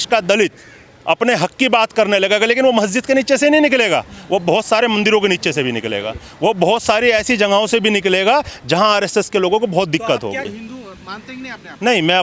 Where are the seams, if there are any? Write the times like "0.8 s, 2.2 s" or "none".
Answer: 10.4 s